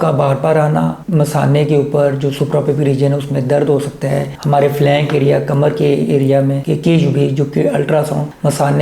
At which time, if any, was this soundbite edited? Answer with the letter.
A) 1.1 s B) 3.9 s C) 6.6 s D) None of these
C